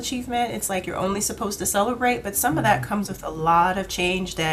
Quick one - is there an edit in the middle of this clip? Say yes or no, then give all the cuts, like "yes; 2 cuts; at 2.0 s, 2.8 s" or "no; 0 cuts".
no; 0 cuts